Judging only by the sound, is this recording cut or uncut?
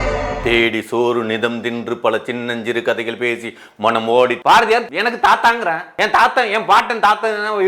cut